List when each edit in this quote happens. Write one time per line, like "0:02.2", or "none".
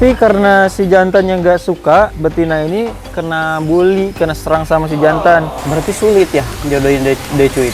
0:02.1
0:03.0
0:05.5